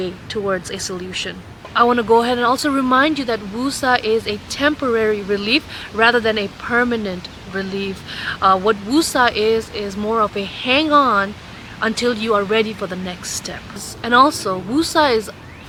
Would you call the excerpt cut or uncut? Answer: uncut